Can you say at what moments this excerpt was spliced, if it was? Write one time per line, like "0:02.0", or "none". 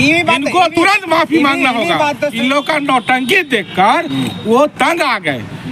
0:02.3